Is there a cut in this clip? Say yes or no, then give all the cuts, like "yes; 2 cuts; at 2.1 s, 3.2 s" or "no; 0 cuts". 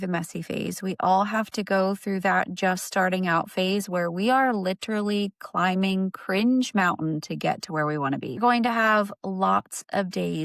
no; 0 cuts